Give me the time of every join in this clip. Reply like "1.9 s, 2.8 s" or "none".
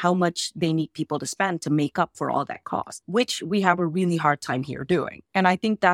none